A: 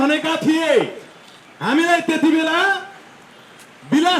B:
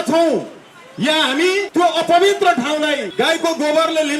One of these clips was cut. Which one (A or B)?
B